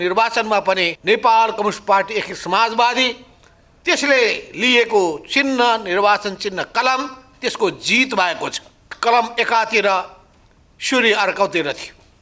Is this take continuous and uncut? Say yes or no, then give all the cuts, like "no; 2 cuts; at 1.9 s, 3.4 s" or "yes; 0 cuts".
no; 2 cuts; at 0.9 s, 8.9 s